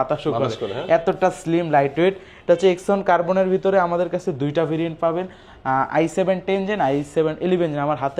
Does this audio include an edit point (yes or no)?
no